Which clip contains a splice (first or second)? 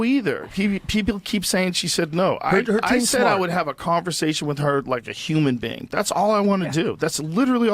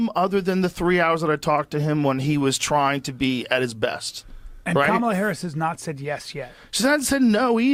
first